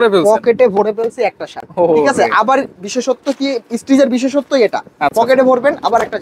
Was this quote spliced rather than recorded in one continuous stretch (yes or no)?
no